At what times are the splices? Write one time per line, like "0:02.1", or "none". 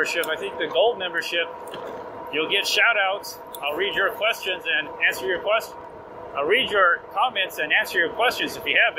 none